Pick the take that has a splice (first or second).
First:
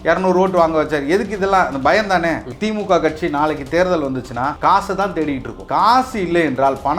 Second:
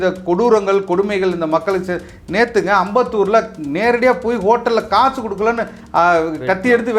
first